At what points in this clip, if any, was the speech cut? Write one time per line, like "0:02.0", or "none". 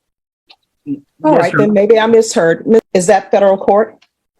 0:02.9